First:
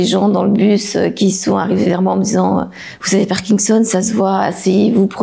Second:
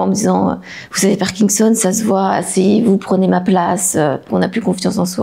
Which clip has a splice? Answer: second; 1 cut; at 4.2 s

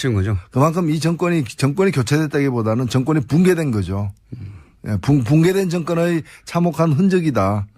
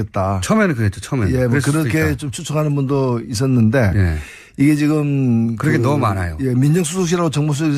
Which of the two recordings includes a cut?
first; 1 cut; at 1.9 s

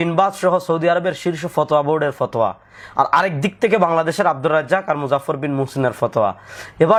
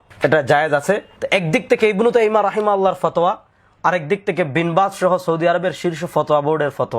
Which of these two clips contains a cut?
second; 1 cut; at 1.1 s

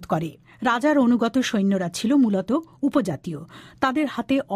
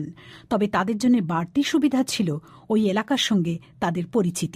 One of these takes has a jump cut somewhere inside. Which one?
first; 1 cut; at 1.0 s

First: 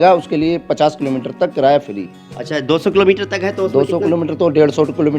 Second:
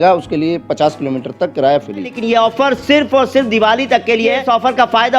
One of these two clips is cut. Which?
second; 2 cuts; at 2.2 s, 4.4 s

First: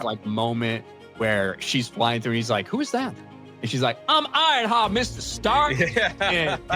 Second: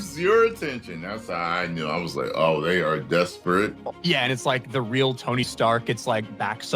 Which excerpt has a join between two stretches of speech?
second; 1 cut; at 3.9 s

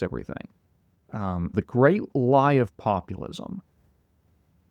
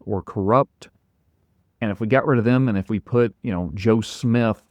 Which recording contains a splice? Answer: first; 1 cut; at 1.5 s

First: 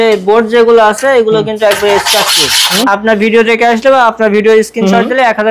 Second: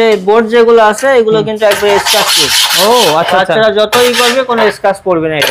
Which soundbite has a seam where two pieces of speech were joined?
first; 1 cut; at 2.7 s

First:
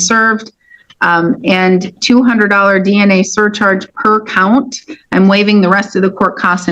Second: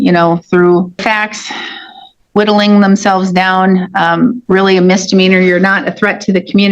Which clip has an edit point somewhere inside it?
second; 2 cuts; at 1.0 s, 4.4 s

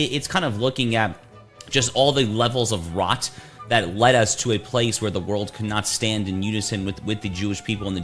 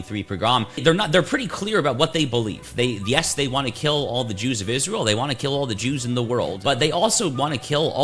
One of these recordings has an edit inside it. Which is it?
second; 2 cuts; at 0.8 s, 6.6 s

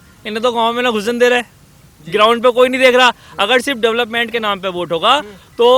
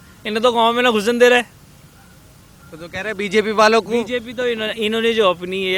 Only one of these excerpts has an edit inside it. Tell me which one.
first; 1 cut; at 1.9 s

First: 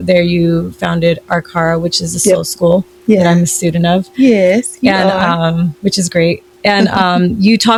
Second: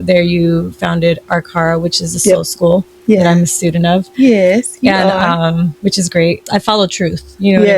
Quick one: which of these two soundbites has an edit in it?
second; 1 cut; at 6.4 s

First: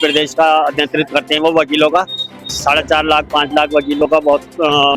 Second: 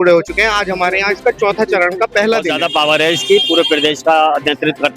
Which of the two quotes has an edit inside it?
second; 1 cut; at 2.6 s

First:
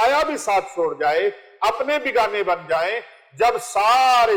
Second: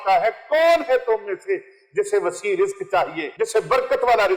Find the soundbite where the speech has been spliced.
second; 1 cut; at 3.2 s

